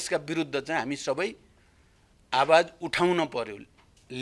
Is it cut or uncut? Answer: uncut